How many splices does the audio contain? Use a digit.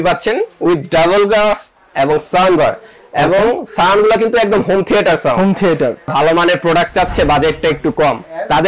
1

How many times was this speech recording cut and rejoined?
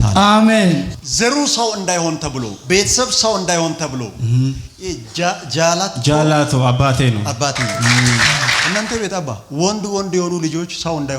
2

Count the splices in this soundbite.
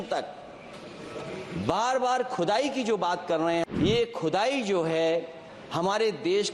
1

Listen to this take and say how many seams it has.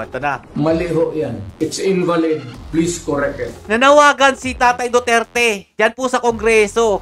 1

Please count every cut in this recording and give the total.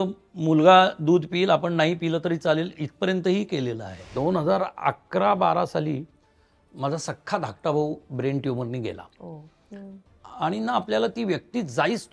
1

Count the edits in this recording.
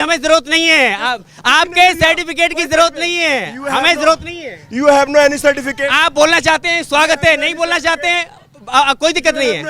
0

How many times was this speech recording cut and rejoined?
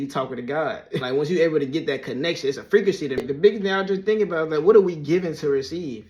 2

